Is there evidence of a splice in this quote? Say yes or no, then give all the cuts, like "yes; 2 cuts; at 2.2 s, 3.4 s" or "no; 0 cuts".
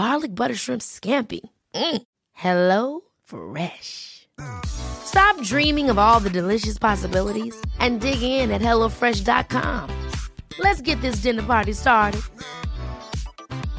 no; 0 cuts